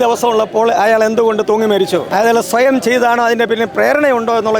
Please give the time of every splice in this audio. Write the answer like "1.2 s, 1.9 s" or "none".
2.1 s